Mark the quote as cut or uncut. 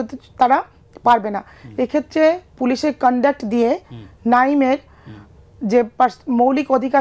uncut